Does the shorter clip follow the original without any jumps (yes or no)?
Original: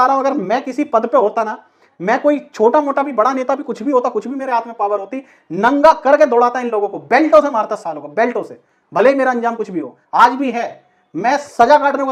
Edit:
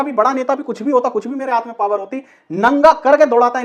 yes